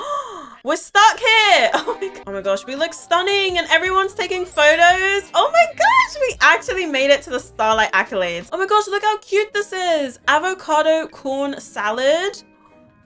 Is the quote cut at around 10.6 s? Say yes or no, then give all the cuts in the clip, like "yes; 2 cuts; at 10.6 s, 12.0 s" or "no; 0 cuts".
no; 2 cuts; at 2.2 s, 8.4 s